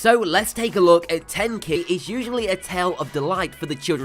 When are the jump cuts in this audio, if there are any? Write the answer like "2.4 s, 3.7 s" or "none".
none